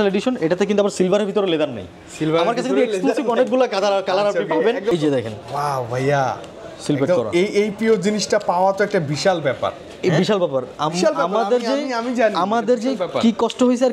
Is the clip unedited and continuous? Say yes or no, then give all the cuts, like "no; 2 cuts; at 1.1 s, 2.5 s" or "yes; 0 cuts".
no; 1 cut; at 4.9 s